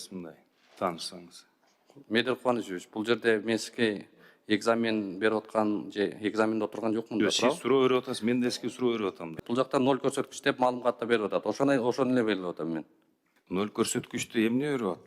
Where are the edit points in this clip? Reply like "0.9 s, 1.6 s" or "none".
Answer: 9.3 s